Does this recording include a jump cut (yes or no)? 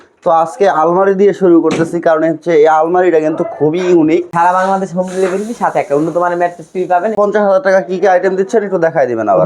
yes